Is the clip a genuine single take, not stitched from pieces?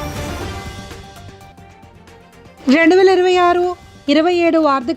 yes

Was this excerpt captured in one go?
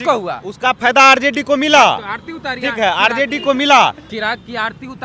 no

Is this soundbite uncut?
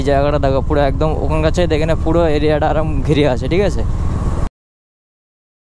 yes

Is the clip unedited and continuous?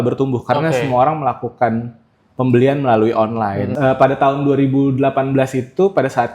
no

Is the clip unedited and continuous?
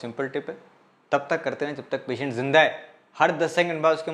yes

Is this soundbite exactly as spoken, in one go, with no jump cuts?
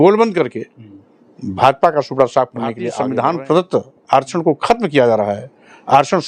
no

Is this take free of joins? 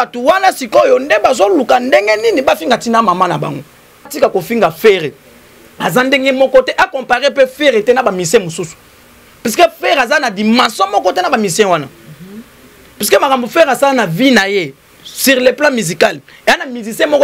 no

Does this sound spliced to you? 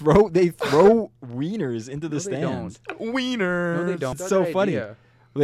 yes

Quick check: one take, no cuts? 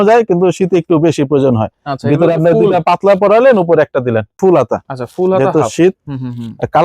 no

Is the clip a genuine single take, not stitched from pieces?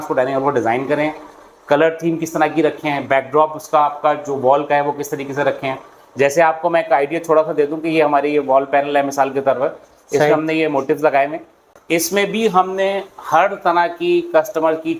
yes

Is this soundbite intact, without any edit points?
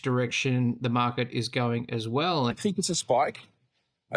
no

